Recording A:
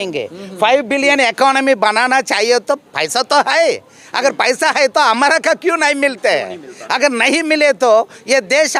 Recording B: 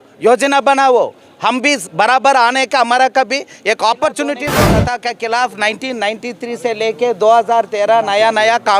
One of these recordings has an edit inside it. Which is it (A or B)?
B